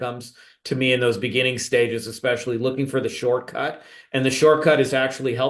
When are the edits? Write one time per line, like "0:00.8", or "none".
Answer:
none